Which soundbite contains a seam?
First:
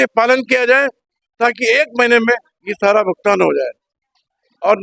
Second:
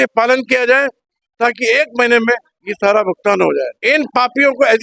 second; 1 cut; at 3.7 s

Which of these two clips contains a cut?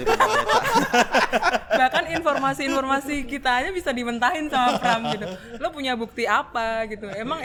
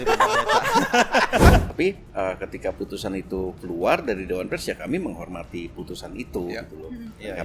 second; 1 cut; at 1.6 s

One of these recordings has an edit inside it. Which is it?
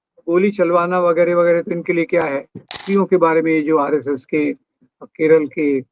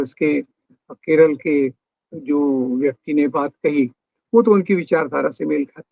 first; 1 cut; at 2.8 s

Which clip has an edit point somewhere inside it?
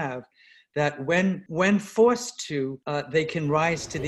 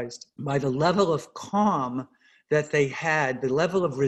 first; 2 cuts; at 1.4 s, 2.8 s

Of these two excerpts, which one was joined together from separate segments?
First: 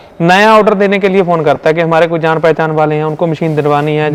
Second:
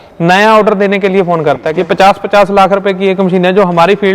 second; 1 cut; at 1.7 s

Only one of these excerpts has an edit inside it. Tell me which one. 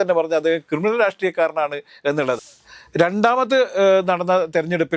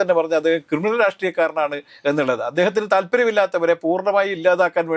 first; 1 cut; at 2.4 s

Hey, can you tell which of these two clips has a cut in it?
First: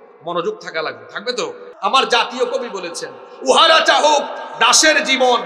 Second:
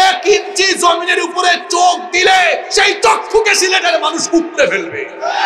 first; 1 cut; at 1.7 s

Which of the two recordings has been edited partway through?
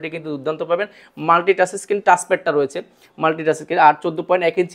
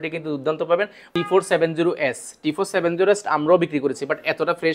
second; 1 cut; at 1.1 s

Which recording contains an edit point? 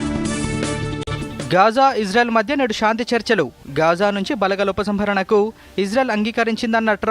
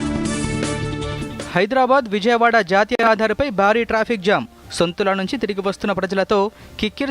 first; 1 cut; at 1.1 s

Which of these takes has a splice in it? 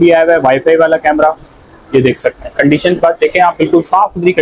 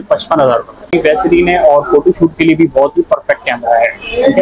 second; 1 cut; at 0.9 s

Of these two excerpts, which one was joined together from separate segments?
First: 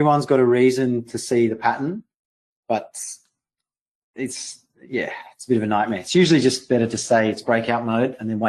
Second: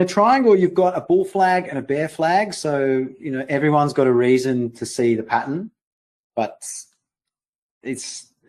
second; 1 cut; at 2.2 s

